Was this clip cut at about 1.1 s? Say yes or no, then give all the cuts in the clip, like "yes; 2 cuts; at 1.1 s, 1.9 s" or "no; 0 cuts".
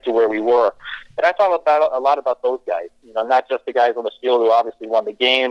no; 0 cuts